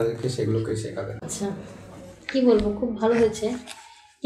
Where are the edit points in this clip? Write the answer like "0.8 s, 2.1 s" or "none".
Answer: 1.3 s